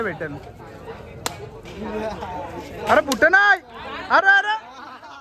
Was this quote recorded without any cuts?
yes; 0 cuts

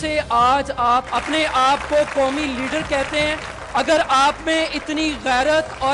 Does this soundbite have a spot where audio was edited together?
yes; 2 cuts; at 1.1 s, 3.5 s

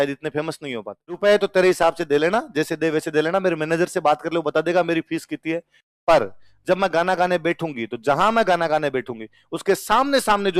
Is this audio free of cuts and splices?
no; 1 cut; at 1.2 s

